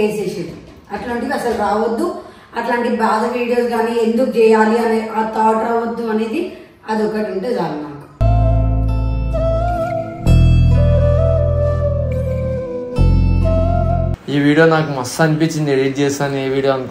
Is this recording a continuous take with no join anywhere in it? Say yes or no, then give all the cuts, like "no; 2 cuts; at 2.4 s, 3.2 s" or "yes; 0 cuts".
no; 1 cut; at 14.1 s